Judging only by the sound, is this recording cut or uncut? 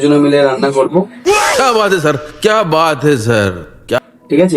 cut